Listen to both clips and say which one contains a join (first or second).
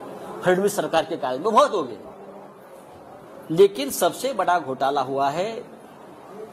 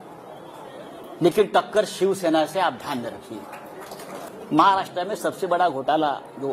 second